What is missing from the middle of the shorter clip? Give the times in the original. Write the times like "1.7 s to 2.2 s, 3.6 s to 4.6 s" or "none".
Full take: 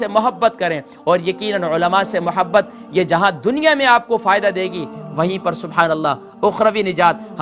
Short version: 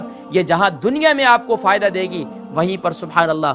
none